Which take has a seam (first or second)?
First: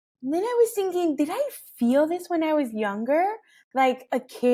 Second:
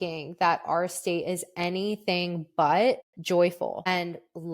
second